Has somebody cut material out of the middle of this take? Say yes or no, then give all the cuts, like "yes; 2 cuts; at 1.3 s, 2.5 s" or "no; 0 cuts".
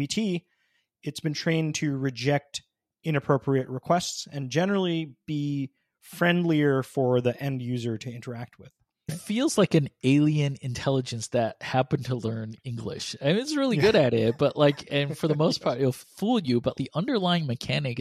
yes; 2 cuts; at 9.2 s, 16.8 s